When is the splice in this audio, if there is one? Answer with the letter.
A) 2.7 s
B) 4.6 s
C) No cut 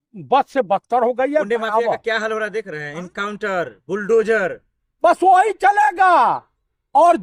C